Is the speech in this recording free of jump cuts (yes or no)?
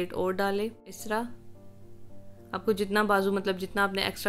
no